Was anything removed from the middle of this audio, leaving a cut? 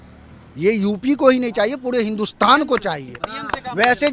no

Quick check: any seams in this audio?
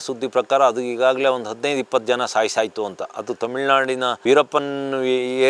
yes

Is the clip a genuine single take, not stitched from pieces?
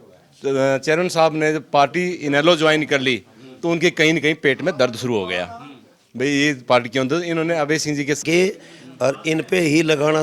no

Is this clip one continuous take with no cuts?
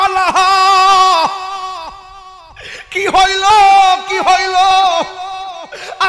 yes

